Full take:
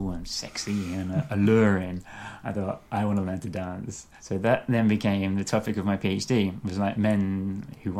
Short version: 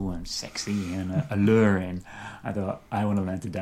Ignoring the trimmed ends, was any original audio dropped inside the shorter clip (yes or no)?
no